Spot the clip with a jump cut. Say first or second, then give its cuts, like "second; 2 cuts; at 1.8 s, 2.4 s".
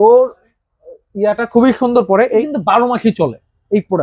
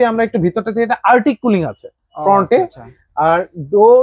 first; 1 cut; at 2.4 s